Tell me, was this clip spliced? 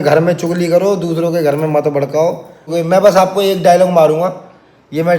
yes; 1 cut; at 2.7 s

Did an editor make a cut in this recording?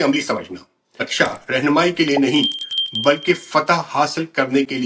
yes; 1 cut; at 1.1 s

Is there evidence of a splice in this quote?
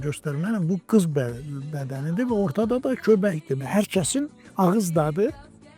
yes; 1 cut; at 3.5 s

